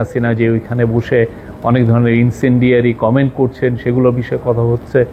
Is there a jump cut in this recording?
no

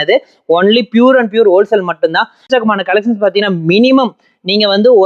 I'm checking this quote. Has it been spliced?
yes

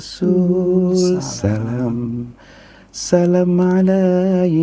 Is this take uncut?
yes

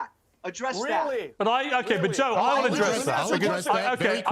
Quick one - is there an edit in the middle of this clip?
yes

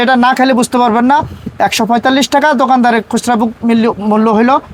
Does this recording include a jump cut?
no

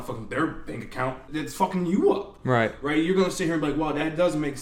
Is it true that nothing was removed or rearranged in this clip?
no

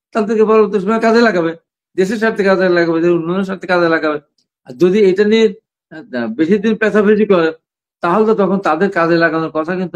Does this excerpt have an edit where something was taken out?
no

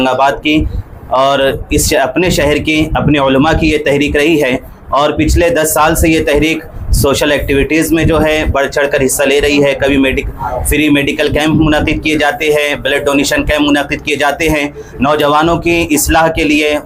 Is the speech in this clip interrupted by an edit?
no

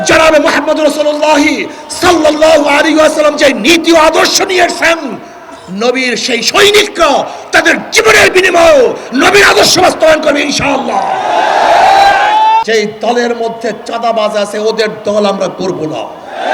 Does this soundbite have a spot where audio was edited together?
yes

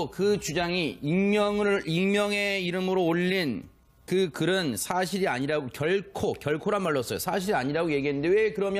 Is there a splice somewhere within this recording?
yes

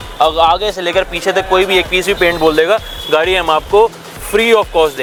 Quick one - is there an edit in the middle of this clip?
no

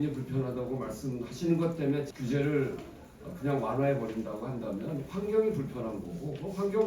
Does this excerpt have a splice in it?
yes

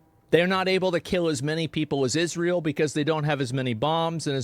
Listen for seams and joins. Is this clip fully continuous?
no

